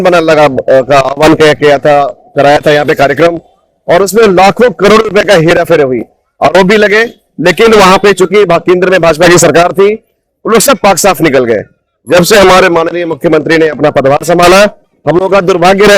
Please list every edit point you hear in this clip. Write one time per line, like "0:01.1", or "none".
none